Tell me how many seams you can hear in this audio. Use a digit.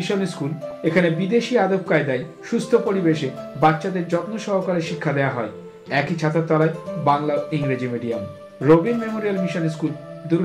0